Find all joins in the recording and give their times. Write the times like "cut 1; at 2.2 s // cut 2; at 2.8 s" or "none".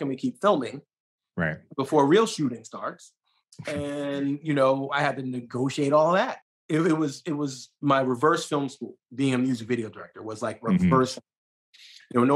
cut 1; at 6.5 s